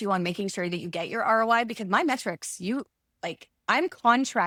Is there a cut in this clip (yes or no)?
no